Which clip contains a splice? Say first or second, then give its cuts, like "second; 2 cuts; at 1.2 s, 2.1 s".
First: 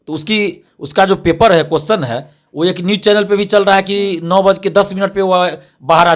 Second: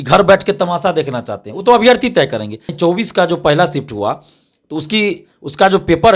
second; 1 cut; at 2.7 s